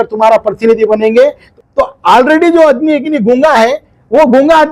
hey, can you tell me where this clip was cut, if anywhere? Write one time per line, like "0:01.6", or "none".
0:01.4

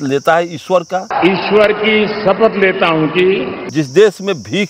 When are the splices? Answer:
0:01.1
0:03.6

